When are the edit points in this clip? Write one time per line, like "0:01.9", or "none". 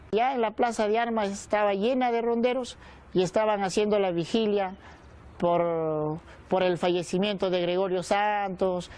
0:06.3